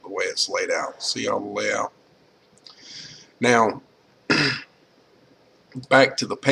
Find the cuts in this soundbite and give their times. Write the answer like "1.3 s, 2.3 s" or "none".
none